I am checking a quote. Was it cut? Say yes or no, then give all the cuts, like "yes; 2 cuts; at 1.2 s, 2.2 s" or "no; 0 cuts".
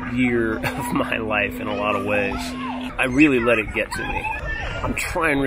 yes; 1 cut; at 2.9 s